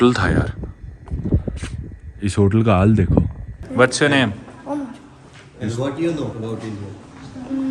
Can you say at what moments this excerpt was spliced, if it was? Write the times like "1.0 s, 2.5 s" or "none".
3.6 s, 6.3 s